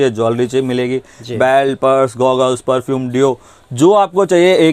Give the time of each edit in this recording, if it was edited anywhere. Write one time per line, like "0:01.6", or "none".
none